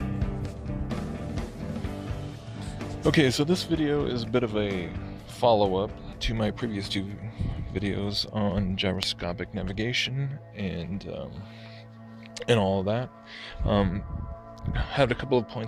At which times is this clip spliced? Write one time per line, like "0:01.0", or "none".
0:03.3